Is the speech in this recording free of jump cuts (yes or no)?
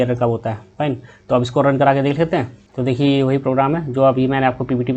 no